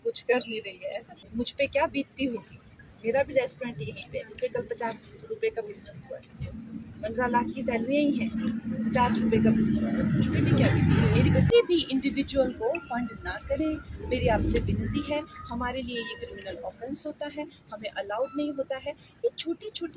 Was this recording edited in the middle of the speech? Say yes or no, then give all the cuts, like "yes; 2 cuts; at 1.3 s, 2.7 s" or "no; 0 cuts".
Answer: yes; 2 cuts; at 1.3 s, 11.5 s